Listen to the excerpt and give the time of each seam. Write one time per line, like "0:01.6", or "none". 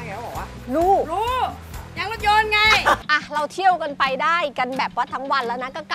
0:03.0